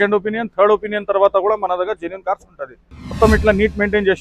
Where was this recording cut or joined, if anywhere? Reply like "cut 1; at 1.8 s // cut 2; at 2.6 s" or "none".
cut 1; at 3.1 s